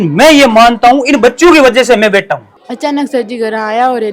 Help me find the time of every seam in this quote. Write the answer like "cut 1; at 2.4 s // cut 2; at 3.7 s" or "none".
cut 1; at 2.5 s